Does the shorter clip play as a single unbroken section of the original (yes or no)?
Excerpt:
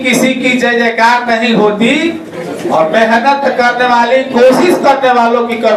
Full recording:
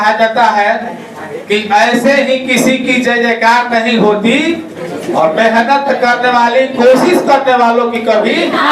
yes